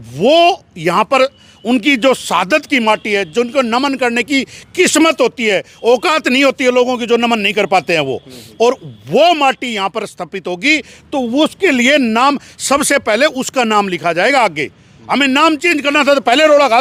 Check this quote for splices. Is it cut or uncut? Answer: uncut